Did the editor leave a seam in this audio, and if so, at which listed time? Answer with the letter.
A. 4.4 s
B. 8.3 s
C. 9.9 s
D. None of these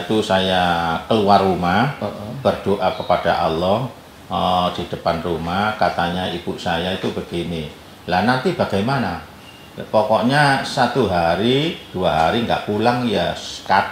D